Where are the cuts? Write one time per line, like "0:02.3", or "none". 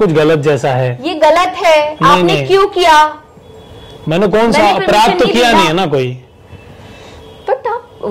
none